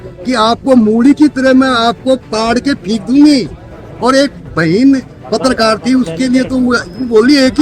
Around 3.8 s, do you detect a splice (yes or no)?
no